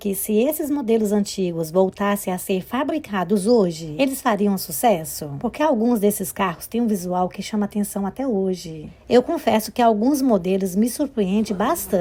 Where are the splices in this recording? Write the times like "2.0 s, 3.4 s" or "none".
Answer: none

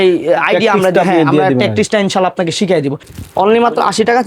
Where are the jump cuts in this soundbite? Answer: 3.1 s

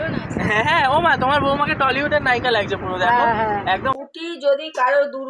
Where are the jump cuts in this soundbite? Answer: 3.9 s

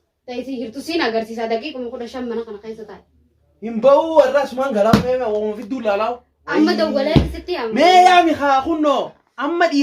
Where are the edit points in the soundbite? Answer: 6.3 s

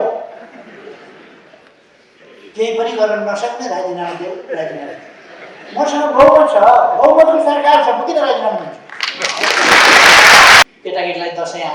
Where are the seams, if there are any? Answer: 10.6 s

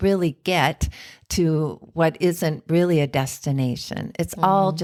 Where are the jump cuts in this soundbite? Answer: none

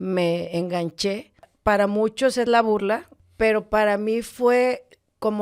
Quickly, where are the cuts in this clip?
1.5 s, 3.2 s

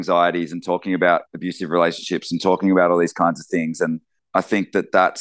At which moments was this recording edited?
4.1 s

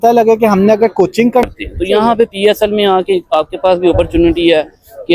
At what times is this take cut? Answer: 1.4 s

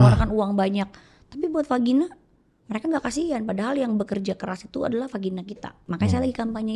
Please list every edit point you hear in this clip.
5.8 s

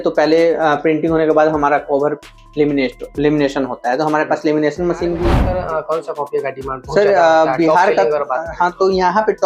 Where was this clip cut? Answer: 5.5 s

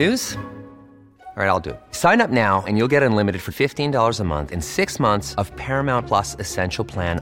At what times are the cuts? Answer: none

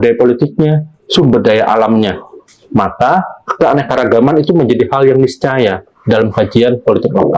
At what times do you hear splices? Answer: none

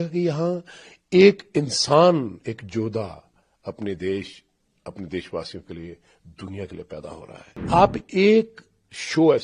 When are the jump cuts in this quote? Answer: 7.6 s

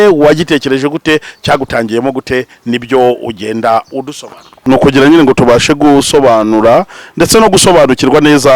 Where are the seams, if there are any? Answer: 4.5 s

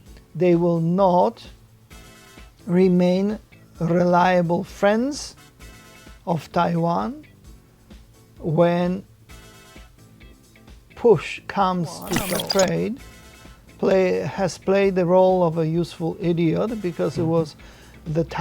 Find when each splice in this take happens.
12.2 s

